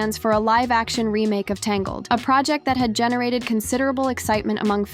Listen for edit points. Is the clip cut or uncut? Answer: uncut